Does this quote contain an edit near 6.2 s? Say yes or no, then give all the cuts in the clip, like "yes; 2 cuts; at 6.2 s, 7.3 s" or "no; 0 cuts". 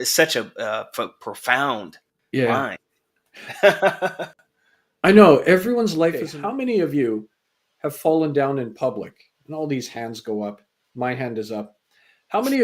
yes; 1 cut; at 6.2 s